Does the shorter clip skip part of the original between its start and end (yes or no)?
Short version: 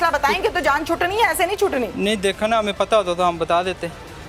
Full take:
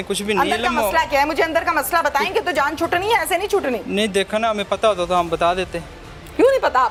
no